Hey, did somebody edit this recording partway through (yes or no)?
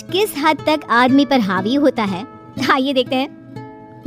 no